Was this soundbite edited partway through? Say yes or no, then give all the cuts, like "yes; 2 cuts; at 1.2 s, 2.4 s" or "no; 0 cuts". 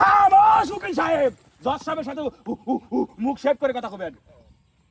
no; 0 cuts